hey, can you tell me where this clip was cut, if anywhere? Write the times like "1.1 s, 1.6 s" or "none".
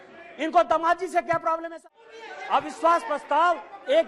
1.8 s